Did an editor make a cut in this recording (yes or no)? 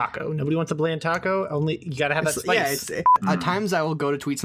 yes